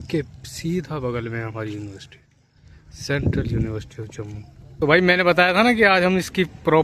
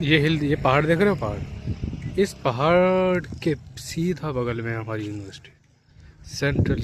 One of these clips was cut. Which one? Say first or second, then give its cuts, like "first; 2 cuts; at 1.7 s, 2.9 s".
first; 1 cut; at 4.7 s